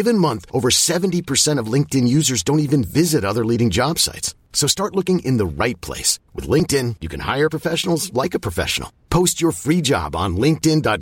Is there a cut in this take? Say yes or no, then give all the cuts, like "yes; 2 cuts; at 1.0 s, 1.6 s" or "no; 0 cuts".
no; 0 cuts